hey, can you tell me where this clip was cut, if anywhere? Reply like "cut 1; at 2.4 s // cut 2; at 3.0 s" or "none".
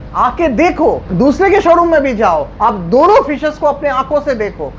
cut 1; at 1.1 s // cut 2; at 2.5 s

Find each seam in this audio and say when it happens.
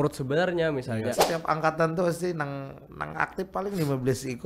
cut 1; at 1.2 s

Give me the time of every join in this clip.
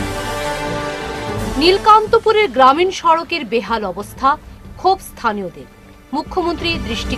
cut 1; at 1.0 s

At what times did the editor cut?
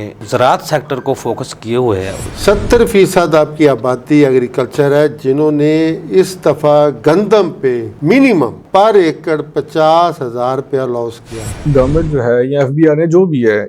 cut 1; at 2.3 s // cut 2; at 8.6 s // cut 3; at 11.6 s

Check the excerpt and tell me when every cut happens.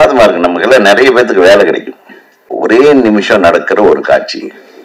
cut 1; at 2.4 s

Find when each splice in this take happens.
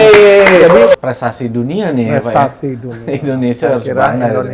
cut 1; at 1.0 s

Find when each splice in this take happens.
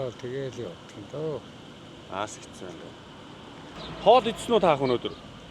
cut 1; at 3.8 s

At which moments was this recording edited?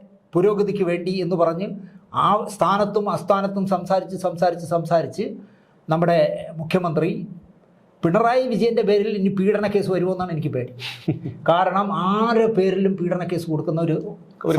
none

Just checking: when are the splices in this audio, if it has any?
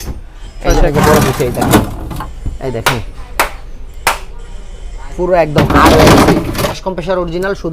cut 1; at 0.9 s // cut 2; at 6.8 s

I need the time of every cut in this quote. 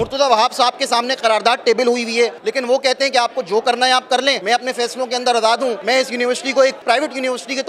cut 1; at 2.4 s // cut 2; at 6.8 s

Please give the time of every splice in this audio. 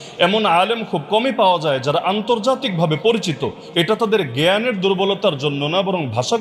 none

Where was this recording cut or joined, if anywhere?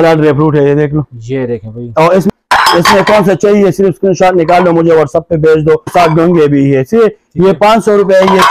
cut 1; at 2.3 s // cut 2; at 5.9 s

